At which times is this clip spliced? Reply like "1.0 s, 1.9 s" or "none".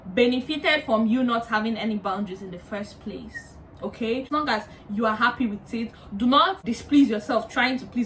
4.3 s, 6.7 s